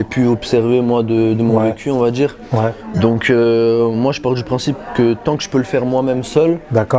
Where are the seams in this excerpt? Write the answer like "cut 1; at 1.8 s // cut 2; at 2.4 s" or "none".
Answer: none